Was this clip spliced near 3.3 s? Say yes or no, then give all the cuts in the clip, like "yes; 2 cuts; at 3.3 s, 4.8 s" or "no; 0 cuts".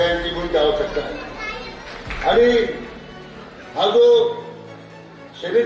no; 1 cut; at 1.8 s